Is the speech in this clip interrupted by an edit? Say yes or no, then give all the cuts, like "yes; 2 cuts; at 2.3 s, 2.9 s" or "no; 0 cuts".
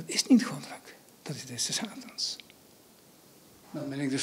no; 0 cuts